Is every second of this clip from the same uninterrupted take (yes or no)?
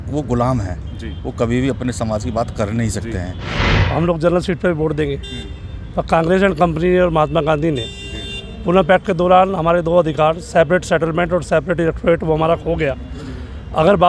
no